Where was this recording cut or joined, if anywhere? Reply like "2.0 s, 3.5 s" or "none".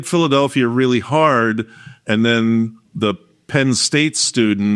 2.8 s